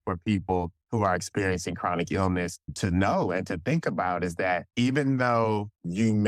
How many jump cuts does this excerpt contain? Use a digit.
1